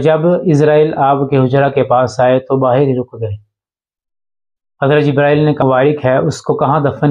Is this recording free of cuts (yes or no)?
no